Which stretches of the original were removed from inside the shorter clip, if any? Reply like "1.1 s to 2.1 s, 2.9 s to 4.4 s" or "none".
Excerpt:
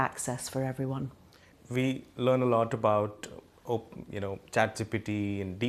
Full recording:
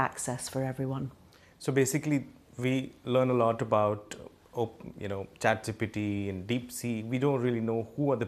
1.5 s to 2.4 s